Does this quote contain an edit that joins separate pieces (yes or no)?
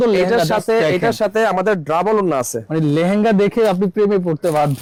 no